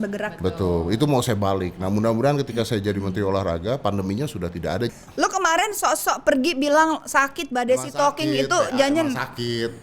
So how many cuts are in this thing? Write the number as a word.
one